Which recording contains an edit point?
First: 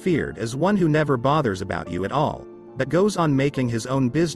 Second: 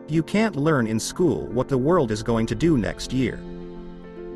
second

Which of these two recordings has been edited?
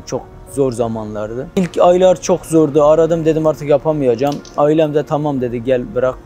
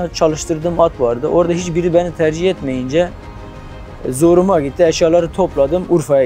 first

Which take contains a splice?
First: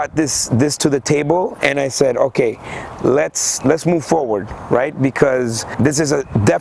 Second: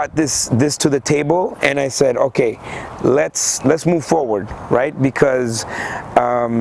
first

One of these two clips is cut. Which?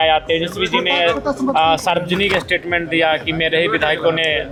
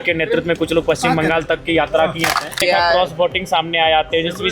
second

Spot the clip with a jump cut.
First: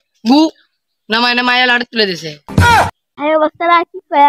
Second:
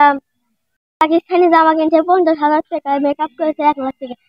first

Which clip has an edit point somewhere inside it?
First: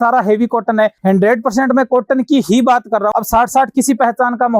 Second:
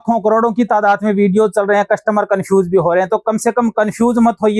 first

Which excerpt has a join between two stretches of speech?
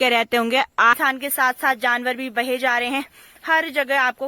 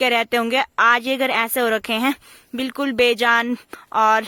first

